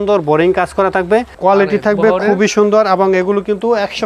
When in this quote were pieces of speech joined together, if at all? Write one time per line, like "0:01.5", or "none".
0:01.3